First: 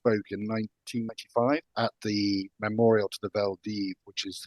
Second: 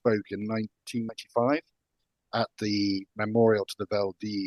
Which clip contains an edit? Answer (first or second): first